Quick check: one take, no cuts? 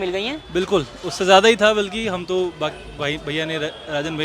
yes; 0 cuts

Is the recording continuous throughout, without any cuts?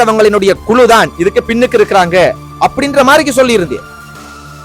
yes; 0 cuts

